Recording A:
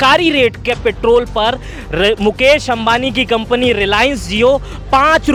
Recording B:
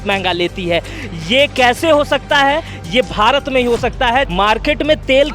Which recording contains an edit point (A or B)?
B